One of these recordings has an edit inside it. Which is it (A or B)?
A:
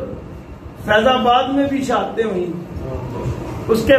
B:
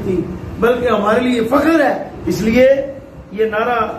B